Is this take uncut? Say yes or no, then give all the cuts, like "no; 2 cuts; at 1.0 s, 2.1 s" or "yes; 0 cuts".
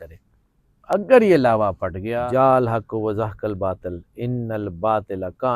no; 1 cut; at 2.1 s